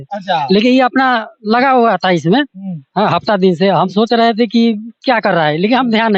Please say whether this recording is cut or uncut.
uncut